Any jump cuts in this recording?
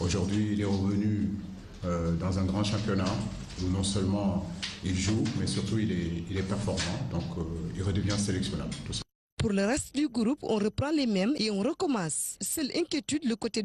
no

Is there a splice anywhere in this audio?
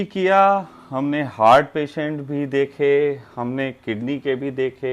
no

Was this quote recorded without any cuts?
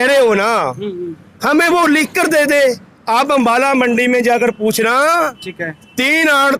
no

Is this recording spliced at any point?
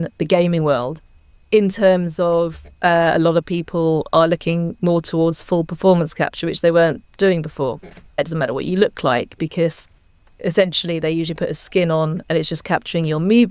yes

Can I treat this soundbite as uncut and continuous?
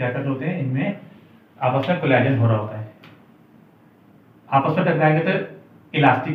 yes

